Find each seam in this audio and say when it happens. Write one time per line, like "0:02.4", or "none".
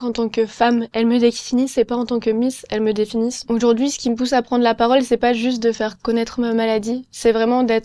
0:03.4